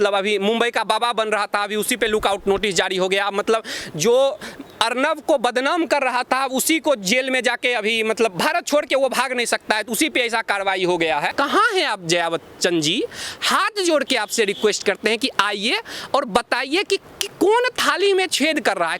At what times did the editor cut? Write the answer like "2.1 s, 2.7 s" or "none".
11.3 s